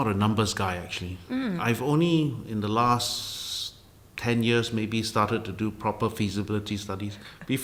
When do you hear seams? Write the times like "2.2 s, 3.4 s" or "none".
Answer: none